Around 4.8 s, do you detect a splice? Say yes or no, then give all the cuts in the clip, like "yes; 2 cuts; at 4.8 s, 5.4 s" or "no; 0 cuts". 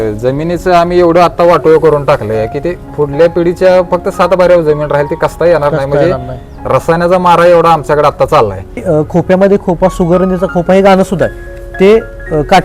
no; 1 cut; at 8.8 s